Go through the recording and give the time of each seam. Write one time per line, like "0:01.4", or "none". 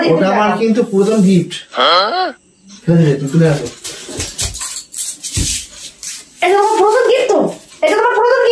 none